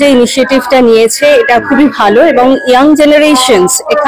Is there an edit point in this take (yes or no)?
no